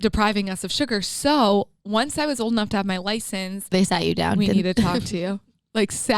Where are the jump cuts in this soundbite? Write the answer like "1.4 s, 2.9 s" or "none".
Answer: 3.7 s

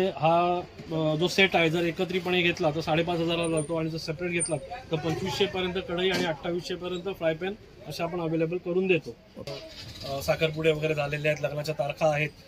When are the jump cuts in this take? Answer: 9.6 s

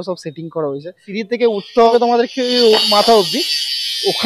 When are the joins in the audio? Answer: 1.0 s, 1.9 s

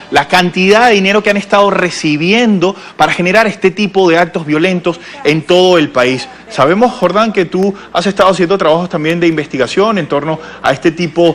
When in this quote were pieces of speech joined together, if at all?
2.3 s

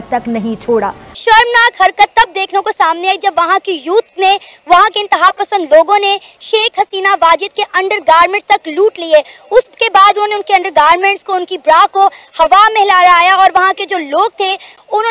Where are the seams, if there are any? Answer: 1.1 s

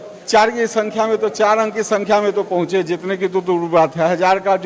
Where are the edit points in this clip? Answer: none

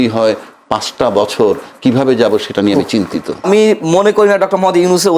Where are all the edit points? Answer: 3.4 s

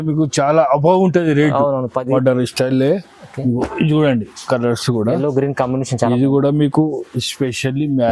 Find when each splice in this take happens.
2.1 s

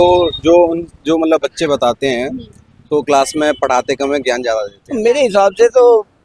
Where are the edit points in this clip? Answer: 4.8 s

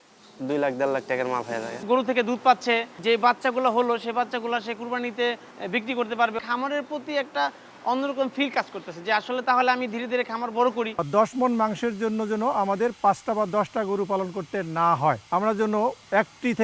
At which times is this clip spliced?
1.8 s, 2.9 s, 5.5 s, 6.4 s, 10.9 s

